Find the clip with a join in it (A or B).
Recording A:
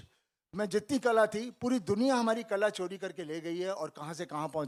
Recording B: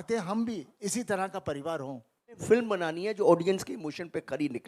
B